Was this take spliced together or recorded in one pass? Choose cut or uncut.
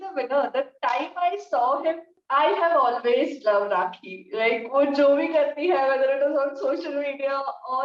cut